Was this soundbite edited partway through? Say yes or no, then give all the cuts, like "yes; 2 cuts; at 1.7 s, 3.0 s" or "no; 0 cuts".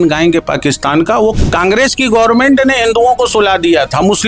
yes; 1 cut; at 1.4 s